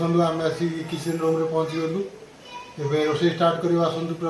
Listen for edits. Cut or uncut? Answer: uncut